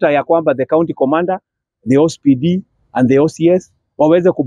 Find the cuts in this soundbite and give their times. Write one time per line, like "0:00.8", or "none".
none